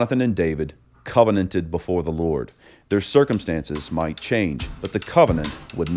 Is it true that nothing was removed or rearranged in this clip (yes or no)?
no